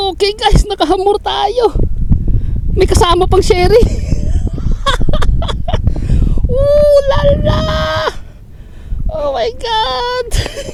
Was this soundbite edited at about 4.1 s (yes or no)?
no